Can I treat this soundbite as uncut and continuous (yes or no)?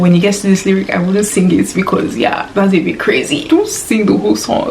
no